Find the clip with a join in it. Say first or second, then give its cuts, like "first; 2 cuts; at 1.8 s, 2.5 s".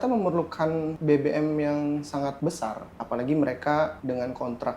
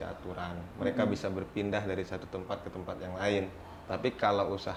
first; 3 cuts; at 0.9 s, 2.5 s, 4.0 s